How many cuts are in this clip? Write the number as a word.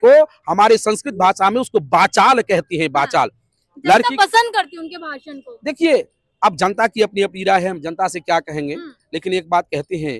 zero